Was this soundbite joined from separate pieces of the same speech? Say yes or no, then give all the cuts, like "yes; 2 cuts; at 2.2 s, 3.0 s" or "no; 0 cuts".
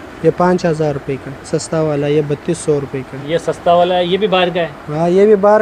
yes; 1 cut; at 1.5 s